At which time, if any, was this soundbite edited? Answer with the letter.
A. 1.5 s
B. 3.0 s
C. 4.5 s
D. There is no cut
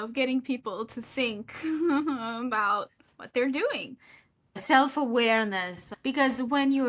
C